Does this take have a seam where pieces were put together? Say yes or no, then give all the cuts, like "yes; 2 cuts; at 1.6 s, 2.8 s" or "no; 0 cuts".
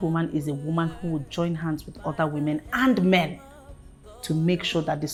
no; 0 cuts